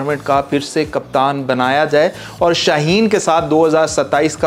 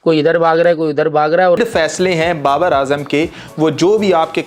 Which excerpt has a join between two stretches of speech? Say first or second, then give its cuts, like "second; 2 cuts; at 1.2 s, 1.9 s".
second; 1 cut; at 1.6 s